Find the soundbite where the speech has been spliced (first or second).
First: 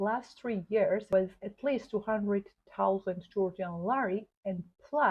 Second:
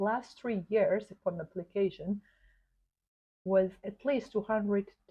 first